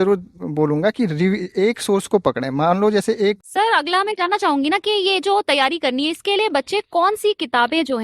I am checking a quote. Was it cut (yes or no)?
yes